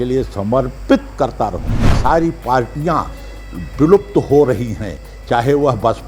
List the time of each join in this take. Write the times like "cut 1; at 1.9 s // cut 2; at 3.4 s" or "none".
cut 1; at 1.9 s

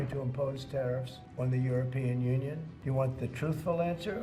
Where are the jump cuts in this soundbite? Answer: cut 1; at 1.2 s // cut 2; at 2.7 s

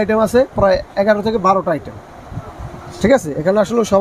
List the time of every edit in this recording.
none

